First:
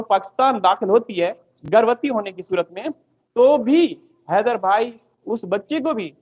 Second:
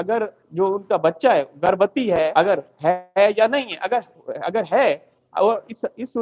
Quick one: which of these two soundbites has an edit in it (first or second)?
second